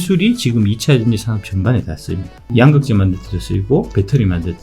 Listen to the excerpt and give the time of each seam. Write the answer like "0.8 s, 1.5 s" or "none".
2.5 s

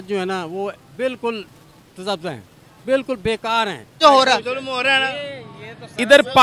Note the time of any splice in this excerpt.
4.0 s

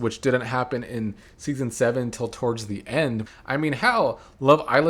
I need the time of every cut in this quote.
3.2 s

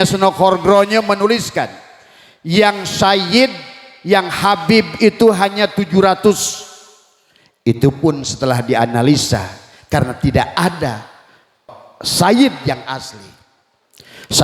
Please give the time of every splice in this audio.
11.8 s

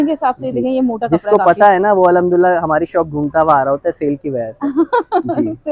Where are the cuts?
none

